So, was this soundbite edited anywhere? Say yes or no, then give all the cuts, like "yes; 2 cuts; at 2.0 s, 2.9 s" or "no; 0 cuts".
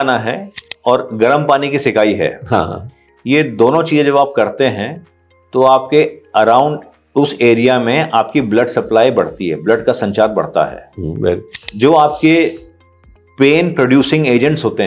yes; 1 cut; at 11.6 s